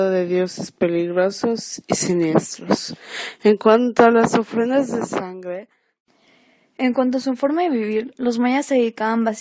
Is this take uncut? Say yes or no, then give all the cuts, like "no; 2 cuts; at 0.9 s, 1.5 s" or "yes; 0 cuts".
no; 1 cut; at 5.9 s